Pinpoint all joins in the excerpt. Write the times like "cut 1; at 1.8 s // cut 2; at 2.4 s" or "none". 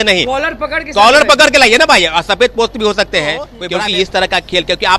cut 1; at 3.6 s

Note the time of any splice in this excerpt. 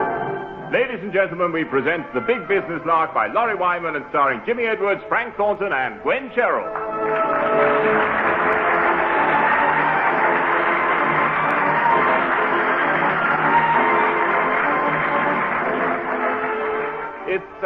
none

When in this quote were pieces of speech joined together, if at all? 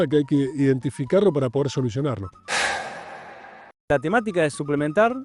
cut 1; at 2.3 s // cut 2; at 3.9 s

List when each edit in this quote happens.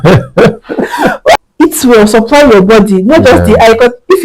cut 1; at 1.3 s

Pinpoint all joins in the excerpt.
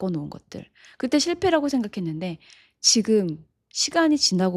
none

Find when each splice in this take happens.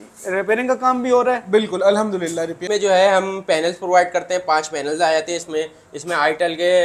cut 1; at 2.6 s

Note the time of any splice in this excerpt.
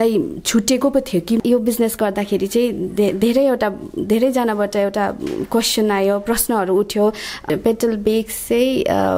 cut 1; at 1.4 s // cut 2; at 7.4 s

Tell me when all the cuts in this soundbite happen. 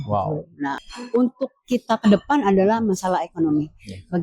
cut 1; at 0.9 s

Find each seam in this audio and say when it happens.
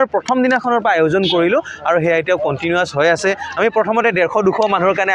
none

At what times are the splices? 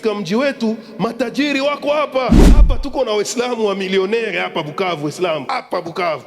cut 1; at 2.6 s // cut 2; at 5.5 s

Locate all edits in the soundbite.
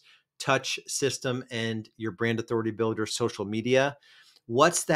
cut 1; at 3.1 s

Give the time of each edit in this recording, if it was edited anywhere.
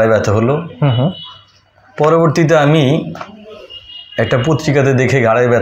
none

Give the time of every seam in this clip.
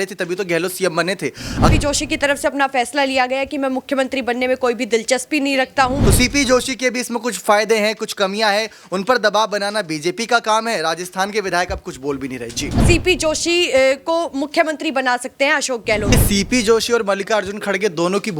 cut 1; at 1.7 s // cut 2; at 6.0 s // cut 3; at 12.8 s // cut 4; at 16.1 s

